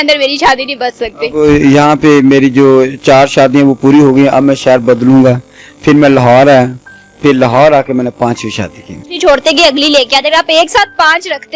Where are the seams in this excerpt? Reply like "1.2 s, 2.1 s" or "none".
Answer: 9.2 s